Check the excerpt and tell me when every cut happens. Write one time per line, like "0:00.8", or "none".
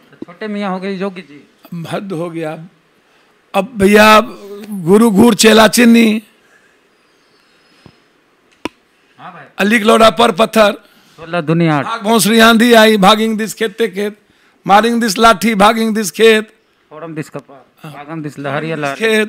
none